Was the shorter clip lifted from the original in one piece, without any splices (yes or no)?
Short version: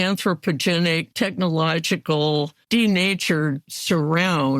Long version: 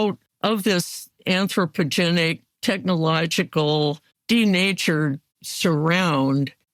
no